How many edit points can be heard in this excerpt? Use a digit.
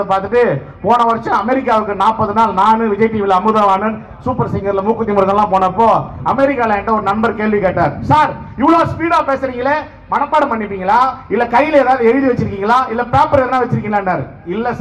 0